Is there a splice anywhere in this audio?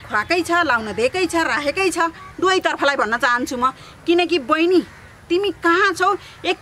yes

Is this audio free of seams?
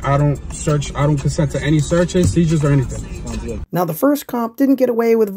yes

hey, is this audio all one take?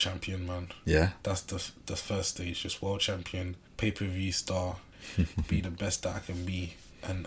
no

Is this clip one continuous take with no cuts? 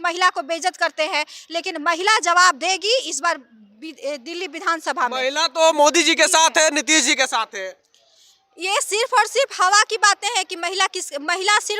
yes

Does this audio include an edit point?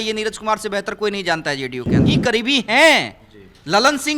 yes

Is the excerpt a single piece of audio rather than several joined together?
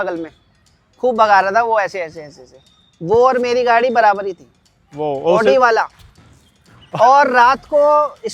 yes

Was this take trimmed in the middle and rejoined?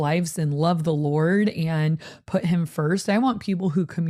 no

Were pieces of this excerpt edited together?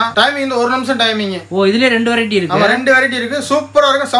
no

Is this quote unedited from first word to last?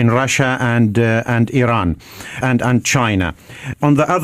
yes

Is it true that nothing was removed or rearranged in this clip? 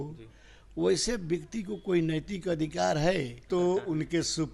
no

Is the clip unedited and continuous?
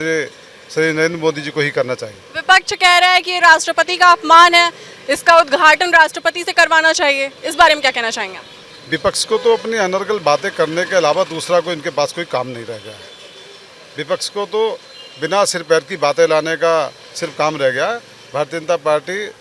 yes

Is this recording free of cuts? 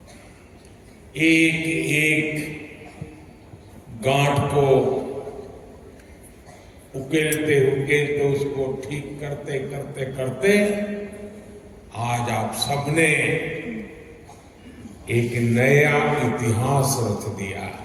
yes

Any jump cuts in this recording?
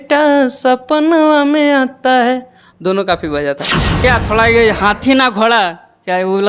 yes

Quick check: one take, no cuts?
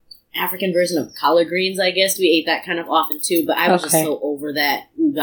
yes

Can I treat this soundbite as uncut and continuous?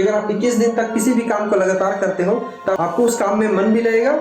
no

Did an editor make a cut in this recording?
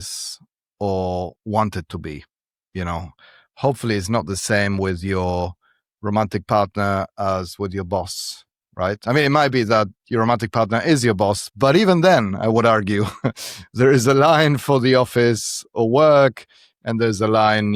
no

